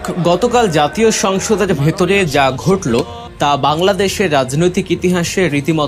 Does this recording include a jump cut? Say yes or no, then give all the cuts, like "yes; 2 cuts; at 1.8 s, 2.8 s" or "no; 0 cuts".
yes; 1 cut; at 3.2 s